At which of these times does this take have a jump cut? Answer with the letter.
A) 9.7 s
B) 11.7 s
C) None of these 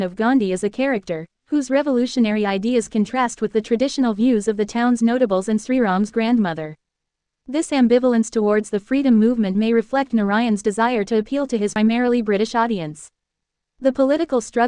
B